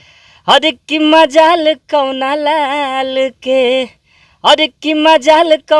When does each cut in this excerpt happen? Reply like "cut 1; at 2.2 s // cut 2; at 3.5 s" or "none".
none

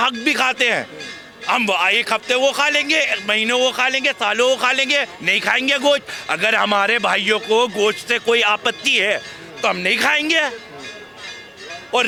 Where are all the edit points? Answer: none

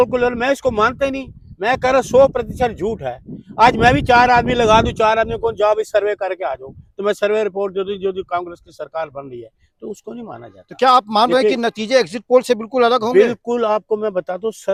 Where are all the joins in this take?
none

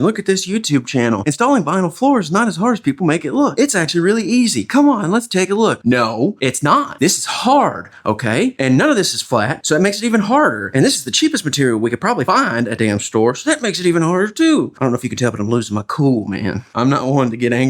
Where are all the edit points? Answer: none

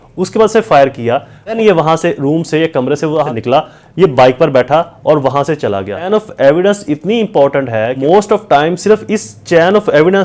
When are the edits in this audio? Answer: cut 1; at 1.5 s // cut 2; at 3.3 s // cut 3; at 6.1 s // cut 4; at 7.9 s

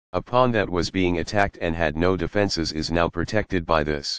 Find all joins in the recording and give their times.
none

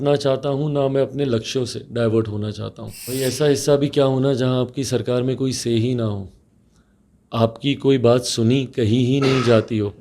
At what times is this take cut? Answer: cut 1; at 3.0 s

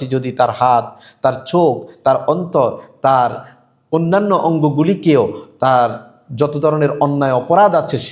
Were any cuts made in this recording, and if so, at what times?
none

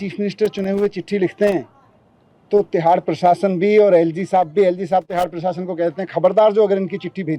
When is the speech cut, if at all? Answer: none

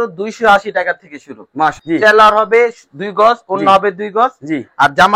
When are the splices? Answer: cut 1; at 1.8 s

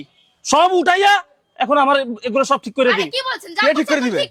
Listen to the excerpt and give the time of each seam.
none

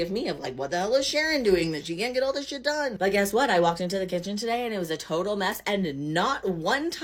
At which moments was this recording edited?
none

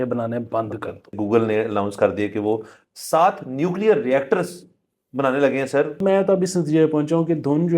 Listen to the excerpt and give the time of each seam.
cut 1; at 1.1 s // cut 2; at 6.0 s

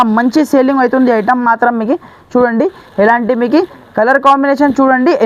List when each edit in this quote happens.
none

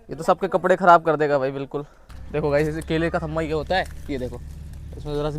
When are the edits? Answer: cut 1; at 2.2 s

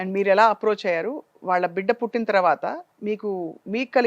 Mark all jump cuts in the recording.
none

